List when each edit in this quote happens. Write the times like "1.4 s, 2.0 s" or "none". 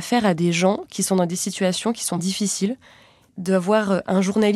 2.2 s